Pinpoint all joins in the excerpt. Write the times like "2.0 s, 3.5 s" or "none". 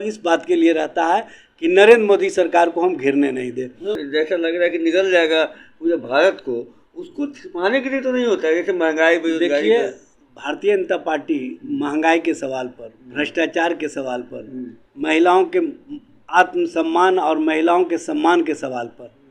4.0 s